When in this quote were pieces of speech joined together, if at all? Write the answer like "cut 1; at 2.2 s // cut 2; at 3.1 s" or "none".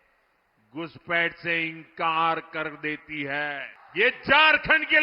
cut 1; at 3.8 s